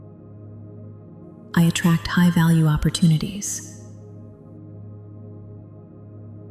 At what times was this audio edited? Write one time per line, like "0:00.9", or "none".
none